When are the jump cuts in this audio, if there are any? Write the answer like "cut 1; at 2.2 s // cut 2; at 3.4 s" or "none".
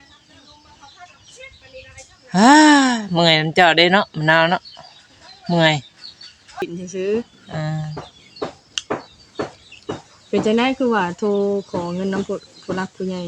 cut 1; at 6.6 s